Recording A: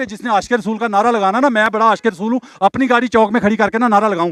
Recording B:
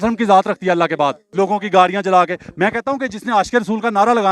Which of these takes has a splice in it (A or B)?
B